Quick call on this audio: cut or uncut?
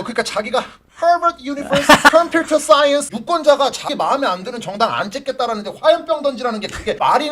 cut